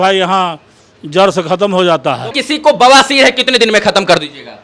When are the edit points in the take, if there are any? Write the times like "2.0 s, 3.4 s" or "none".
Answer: 2.3 s